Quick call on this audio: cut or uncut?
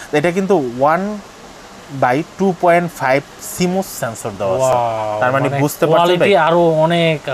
uncut